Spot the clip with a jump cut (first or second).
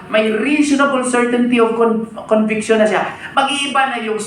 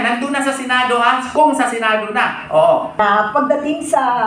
second